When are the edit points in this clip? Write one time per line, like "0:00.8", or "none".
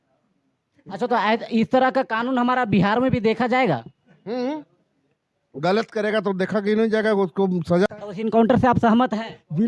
0:07.9